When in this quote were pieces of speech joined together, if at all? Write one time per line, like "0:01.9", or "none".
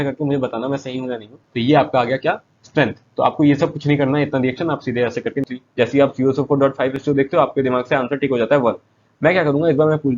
0:01.4
0:05.5